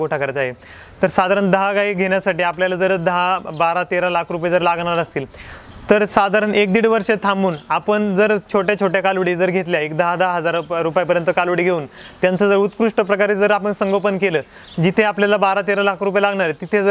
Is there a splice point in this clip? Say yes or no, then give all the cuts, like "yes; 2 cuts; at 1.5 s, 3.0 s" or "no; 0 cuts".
no; 0 cuts